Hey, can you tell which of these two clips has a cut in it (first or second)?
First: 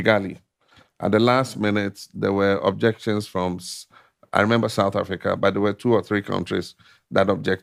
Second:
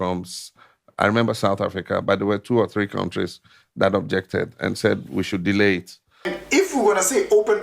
second